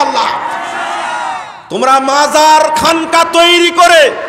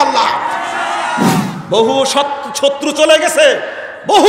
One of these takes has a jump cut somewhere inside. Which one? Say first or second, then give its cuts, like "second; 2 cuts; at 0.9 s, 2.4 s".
second; 1 cut; at 1.5 s